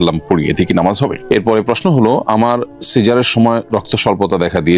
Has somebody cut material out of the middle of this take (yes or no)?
yes